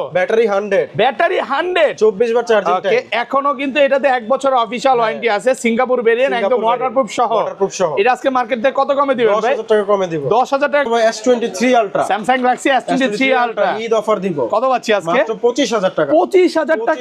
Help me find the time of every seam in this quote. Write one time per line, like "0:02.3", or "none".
0:10.9